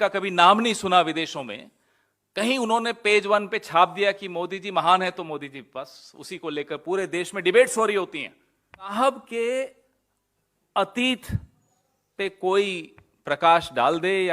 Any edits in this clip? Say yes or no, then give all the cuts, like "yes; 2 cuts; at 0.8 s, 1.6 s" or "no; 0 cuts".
yes; 1 cut; at 8.9 s